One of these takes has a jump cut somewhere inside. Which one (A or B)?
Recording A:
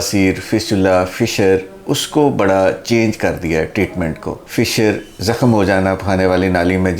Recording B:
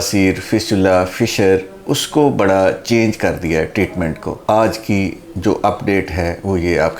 A